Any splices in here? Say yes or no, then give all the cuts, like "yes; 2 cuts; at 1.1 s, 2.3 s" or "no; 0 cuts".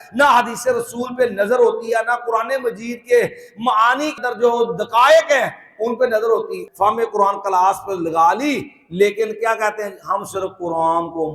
yes; 2 cuts; at 4.2 s, 6.6 s